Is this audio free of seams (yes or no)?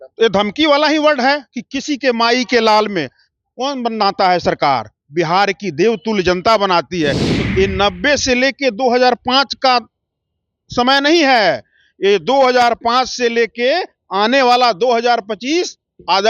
no